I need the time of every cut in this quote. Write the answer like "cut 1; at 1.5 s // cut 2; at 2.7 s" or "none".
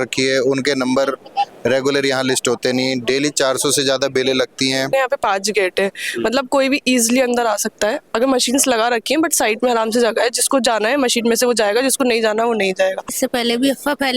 cut 1; at 4.9 s // cut 2; at 13.1 s